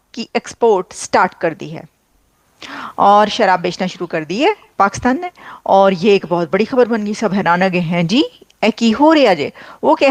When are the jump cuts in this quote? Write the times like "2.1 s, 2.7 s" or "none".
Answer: none